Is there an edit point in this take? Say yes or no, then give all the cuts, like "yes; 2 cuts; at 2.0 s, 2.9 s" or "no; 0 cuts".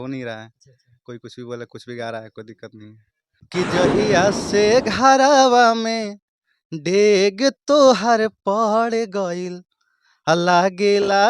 yes; 1 cut; at 3.5 s